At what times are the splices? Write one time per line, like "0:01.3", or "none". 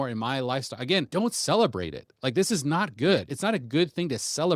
0:01.1
0:03.3